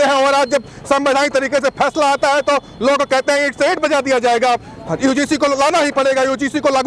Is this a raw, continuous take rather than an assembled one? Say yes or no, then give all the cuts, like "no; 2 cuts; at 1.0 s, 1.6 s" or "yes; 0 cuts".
yes; 0 cuts